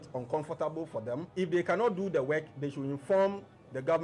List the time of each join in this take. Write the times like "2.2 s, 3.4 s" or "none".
1.3 s